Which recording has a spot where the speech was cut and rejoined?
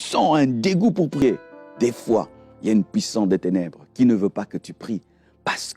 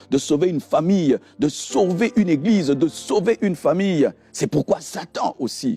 first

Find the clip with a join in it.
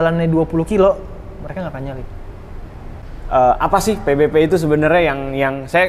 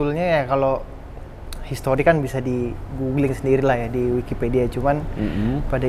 first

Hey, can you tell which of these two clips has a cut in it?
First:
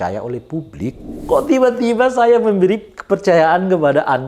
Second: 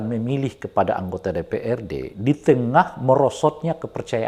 first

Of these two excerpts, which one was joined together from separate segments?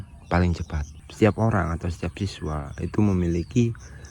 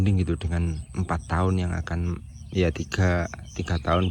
first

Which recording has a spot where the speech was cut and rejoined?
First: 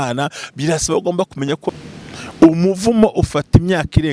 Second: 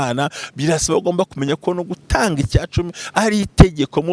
first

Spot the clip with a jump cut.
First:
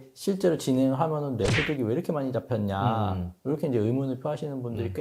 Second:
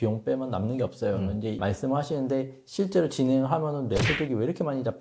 second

